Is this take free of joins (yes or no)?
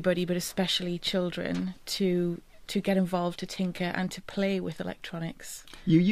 yes